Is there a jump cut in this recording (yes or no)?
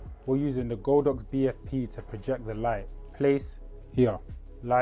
no